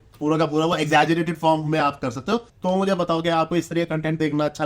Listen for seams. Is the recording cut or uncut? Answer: cut